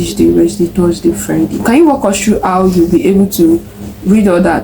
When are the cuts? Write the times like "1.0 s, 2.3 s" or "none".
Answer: 1.6 s